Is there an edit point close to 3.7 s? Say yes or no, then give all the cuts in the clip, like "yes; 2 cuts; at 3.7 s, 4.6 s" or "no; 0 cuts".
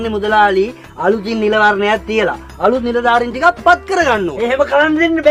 no; 0 cuts